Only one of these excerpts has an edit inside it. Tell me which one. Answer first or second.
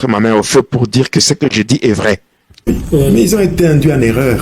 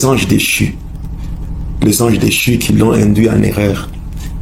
first